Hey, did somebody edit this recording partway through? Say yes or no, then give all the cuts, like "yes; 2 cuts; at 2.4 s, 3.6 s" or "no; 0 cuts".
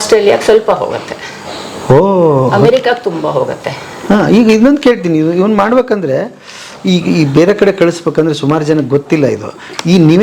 no; 0 cuts